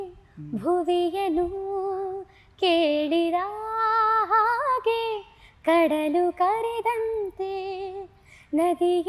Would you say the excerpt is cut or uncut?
uncut